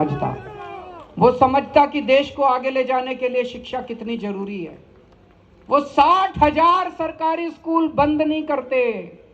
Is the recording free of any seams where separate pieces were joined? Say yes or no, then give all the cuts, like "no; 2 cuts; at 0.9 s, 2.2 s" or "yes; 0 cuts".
yes; 0 cuts